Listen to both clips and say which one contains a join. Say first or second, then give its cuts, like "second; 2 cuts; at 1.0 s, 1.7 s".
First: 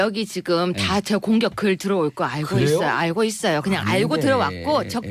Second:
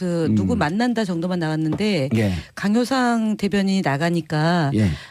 first; 1 cut; at 3.3 s